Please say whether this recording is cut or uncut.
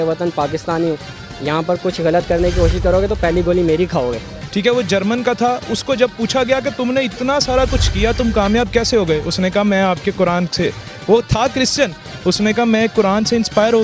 cut